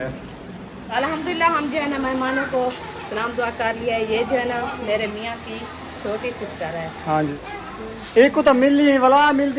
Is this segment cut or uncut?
cut